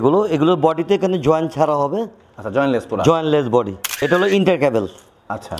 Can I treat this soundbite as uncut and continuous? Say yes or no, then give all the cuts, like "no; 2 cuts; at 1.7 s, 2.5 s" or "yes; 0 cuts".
no; 1 cut; at 4.0 s